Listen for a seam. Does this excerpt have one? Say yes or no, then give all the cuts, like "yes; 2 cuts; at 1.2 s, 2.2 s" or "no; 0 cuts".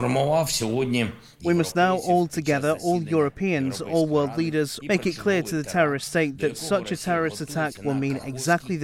yes; 2 cuts; at 4.8 s, 7.8 s